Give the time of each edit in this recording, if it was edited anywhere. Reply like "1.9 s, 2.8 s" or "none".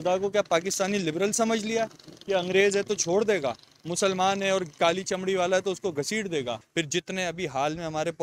6.6 s